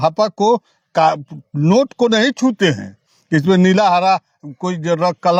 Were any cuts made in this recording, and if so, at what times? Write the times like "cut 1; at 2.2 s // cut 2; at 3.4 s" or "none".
none